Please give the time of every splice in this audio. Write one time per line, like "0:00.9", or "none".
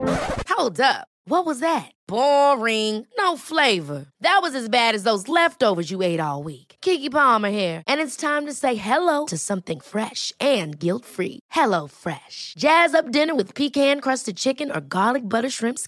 none